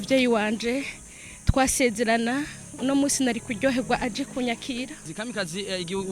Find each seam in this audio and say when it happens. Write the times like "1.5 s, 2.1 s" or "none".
5.1 s